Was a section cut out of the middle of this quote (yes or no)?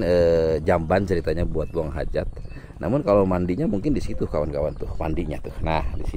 no